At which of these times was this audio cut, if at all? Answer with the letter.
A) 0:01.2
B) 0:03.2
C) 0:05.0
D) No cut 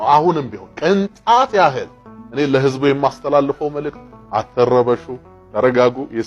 D